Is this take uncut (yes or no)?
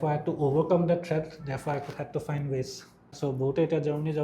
no